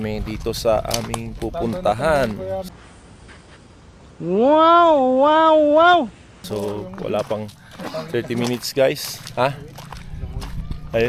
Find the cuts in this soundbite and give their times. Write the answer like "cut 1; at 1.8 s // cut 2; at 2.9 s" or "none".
none